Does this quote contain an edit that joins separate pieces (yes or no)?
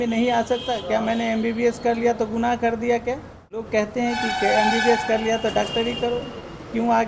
yes